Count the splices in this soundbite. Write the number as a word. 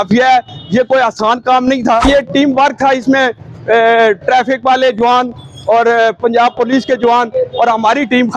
one